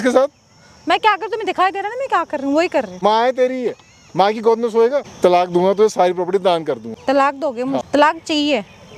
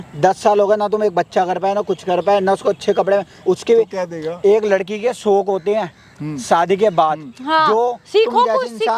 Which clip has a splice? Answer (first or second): first